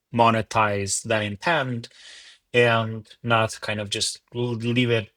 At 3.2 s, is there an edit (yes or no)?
no